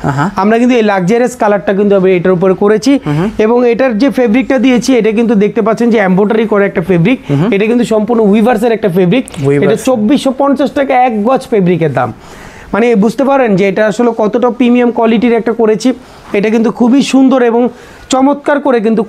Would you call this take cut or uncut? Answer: uncut